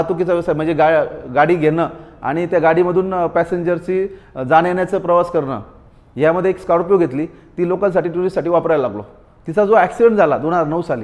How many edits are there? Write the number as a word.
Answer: zero